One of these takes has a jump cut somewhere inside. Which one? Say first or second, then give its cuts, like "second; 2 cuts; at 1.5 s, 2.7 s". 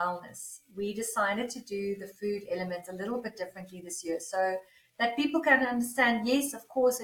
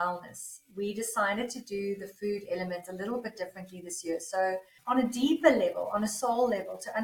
second; 1 cut; at 4.7 s